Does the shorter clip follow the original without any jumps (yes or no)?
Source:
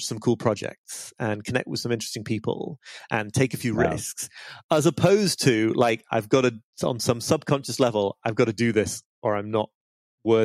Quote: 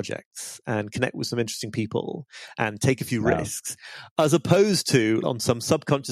no